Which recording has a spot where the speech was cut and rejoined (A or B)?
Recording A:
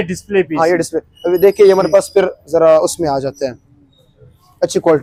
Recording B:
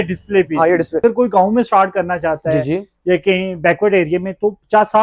B